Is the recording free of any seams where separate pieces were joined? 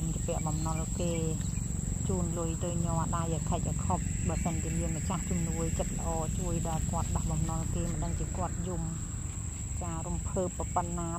yes; 0 cuts

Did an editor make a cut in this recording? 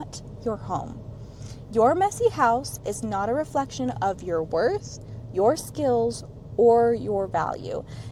no; 0 cuts

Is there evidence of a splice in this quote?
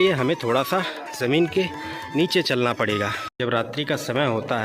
yes; 1 cut; at 3.2 s

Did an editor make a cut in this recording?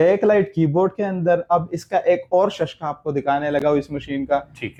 no; 0 cuts

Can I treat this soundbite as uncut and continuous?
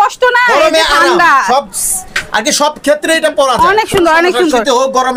yes; 0 cuts

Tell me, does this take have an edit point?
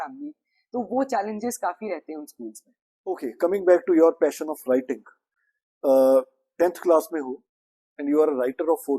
yes; 1 cut; at 3.2 s

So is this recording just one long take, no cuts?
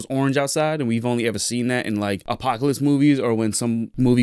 yes; 0 cuts

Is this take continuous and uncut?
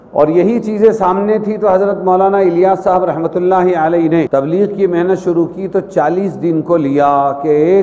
no; 1 cut; at 4.3 s

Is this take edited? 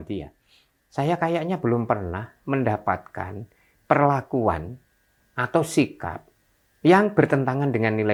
no; 0 cuts

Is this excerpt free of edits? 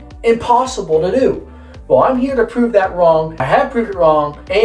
yes; 0 cuts

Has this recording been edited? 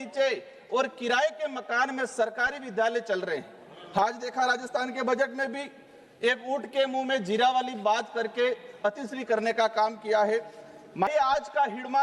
yes; 2 cuts; at 3.9 s, 11.1 s

